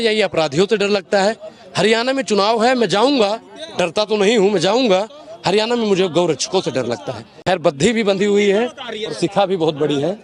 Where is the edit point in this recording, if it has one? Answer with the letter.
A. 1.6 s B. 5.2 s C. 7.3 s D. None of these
C